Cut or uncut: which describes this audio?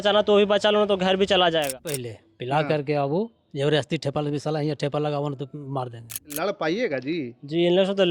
cut